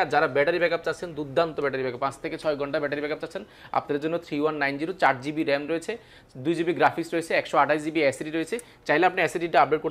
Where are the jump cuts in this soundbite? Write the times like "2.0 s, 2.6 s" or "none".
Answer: none